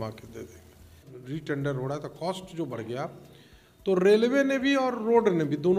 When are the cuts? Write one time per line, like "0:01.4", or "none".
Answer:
0:01.1